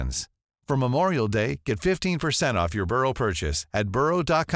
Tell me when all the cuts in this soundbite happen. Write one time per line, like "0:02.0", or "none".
none